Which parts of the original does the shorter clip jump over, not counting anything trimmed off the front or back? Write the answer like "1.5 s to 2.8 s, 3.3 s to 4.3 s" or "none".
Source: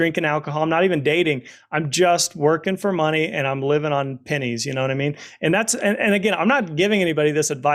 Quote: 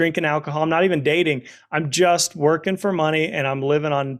none